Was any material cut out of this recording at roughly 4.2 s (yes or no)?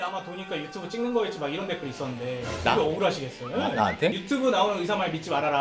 yes